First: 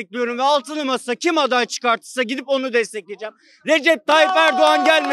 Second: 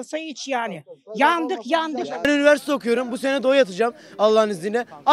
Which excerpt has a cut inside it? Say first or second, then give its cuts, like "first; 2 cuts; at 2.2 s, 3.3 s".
second; 1 cut; at 2.1 s